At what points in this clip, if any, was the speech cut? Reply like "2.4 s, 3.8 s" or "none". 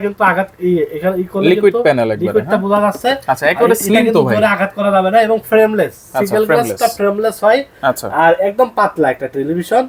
none